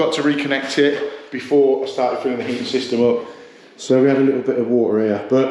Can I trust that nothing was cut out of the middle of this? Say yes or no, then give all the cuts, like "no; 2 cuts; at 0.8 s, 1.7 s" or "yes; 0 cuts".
yes; 0 cuts